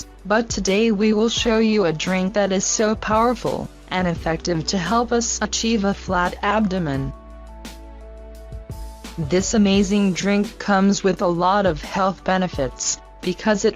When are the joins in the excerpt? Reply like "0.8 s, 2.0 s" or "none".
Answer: 7.9 s

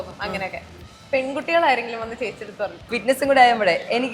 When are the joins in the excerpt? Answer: 2.8 s

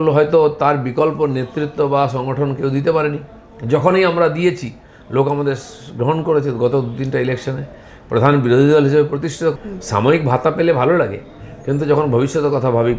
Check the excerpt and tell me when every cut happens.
9.6 s

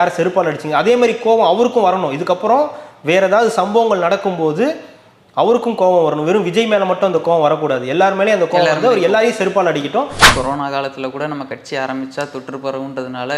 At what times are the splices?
10.2 s

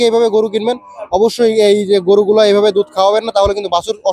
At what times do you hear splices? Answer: none

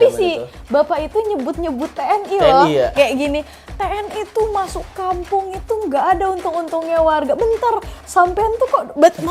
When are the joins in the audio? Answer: none

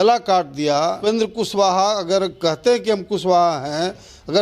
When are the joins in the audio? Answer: 1.0 s

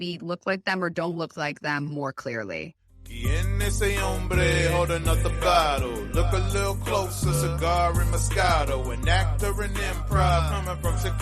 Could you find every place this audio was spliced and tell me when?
3.1 s

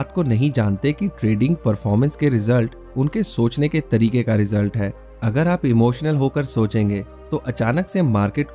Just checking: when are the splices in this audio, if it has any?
none

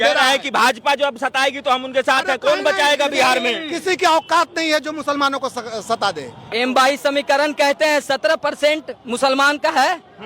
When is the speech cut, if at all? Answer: 6.4 s

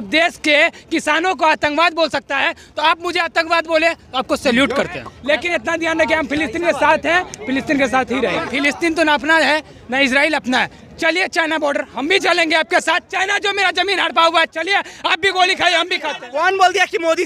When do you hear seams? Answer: 5.1 s, 8.5 s, 16.2 s

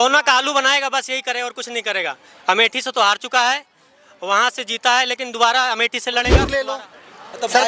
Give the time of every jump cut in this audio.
6.6 s

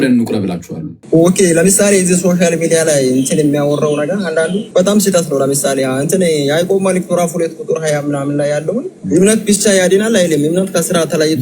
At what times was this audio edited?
1.0 s, 4.6 s, 9.0 s

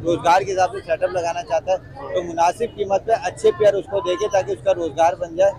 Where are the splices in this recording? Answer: none

